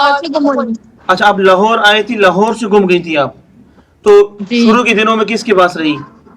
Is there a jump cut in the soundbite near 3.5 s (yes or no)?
no